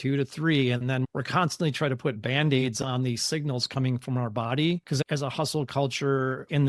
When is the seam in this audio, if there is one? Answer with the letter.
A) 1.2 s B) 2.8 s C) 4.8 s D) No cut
C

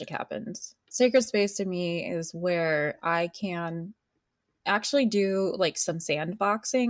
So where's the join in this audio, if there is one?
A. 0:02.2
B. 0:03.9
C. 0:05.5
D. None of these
D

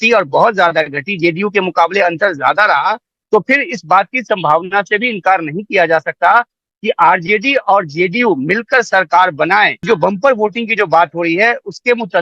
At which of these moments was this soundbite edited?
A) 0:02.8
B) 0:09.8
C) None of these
B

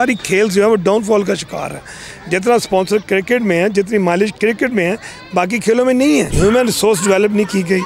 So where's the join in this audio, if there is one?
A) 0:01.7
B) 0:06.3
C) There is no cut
B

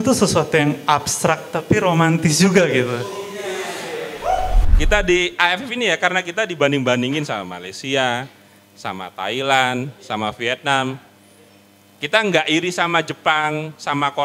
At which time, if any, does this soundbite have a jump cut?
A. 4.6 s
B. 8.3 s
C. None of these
A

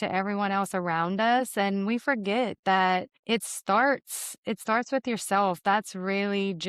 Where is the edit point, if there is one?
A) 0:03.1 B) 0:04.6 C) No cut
A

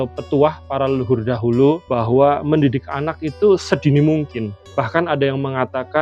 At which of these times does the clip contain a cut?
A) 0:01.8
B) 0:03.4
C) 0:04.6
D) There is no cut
A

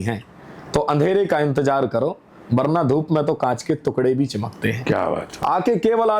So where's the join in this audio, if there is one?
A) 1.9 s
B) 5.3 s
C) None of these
B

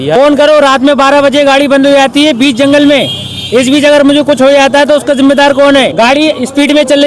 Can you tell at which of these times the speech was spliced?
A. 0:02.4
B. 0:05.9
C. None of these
B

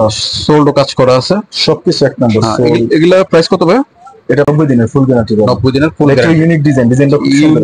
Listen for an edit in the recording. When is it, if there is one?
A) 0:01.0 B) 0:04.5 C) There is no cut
B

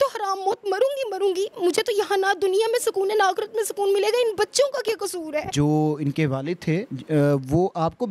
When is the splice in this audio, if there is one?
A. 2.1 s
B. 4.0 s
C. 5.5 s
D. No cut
C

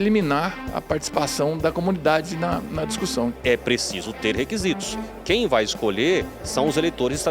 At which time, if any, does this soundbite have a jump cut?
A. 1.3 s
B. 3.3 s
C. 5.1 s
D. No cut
B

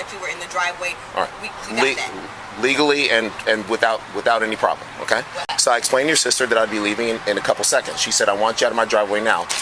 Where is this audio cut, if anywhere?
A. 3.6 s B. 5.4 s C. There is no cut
B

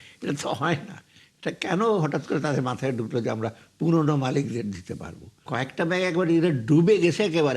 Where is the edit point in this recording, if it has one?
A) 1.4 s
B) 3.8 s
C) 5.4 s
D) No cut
C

